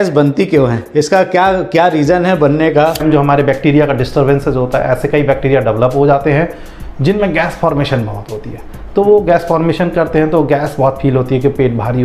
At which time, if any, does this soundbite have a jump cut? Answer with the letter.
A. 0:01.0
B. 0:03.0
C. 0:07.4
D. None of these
B